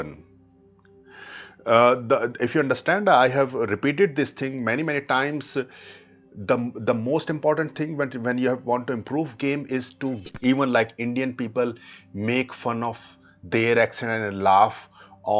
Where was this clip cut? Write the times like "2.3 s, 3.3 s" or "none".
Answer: 10.2 s